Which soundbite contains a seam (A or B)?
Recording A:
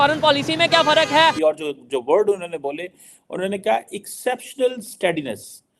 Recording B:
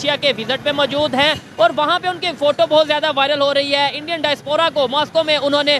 A